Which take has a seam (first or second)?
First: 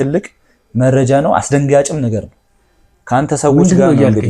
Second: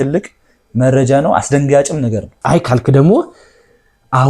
second